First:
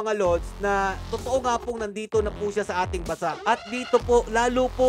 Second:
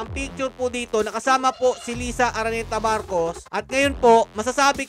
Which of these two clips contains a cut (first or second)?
second